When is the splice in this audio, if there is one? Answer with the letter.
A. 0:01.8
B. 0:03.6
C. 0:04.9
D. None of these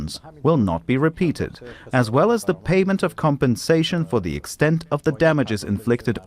A